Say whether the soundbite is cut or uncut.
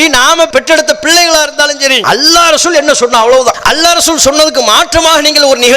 cut